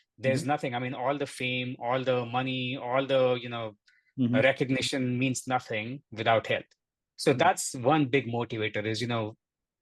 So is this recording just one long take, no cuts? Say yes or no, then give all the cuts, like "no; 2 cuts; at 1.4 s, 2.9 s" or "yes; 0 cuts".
yes; 0 cuts